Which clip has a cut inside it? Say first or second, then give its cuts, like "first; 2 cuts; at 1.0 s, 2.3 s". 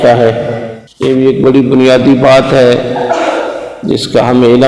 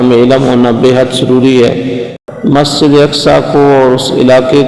second; 1 cut; at 2.2 s